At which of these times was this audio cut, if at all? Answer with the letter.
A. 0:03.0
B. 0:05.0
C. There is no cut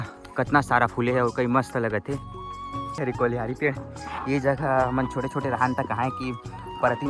A